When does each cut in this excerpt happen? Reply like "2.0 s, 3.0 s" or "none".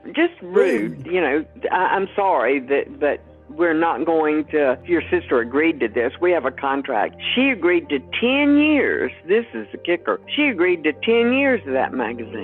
none